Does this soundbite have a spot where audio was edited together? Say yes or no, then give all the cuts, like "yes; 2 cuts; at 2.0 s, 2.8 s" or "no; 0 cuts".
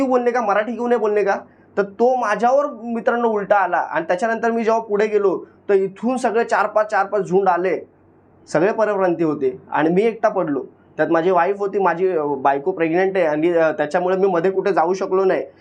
no; 0 cuts